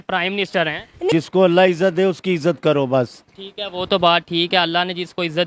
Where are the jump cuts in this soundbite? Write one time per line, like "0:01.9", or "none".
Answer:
0:01.1